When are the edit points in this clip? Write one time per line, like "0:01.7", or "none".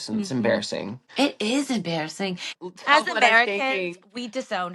0:01.0
0:02.5

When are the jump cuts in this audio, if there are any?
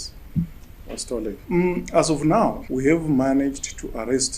0:01.4
0:02.6

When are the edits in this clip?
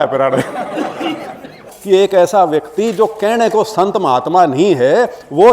0:01.7

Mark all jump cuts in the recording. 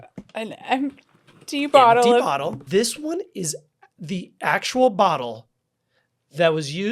0:02.5

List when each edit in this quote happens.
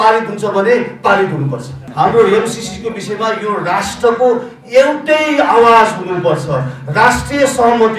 0:01.8

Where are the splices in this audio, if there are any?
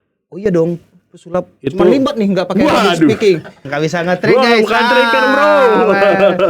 0:03.6

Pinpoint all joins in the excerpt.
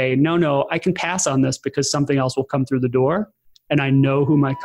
none

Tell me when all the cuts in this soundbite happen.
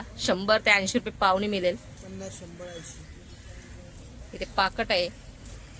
none

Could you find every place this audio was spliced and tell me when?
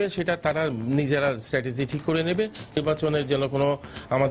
0:02.8

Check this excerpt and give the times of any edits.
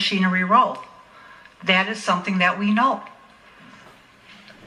none

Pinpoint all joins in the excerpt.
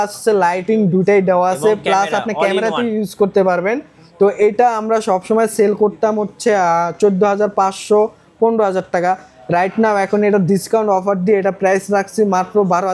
none

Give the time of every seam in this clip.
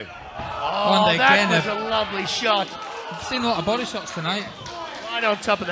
none

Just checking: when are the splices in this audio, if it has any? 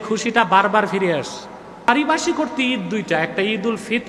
0:01.9

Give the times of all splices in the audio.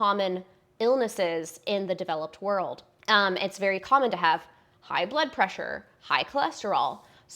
0:02.9

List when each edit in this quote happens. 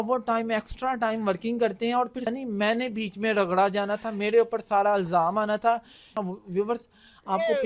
0:02.3
0:06.2

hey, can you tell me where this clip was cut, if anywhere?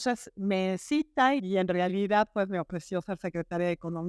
0:01.4

